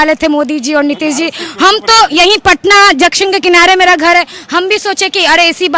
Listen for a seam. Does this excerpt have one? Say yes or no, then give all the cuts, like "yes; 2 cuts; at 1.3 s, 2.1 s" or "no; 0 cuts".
no; 0 cuts